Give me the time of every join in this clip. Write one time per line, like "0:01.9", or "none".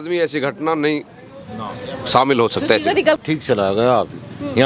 0:03.2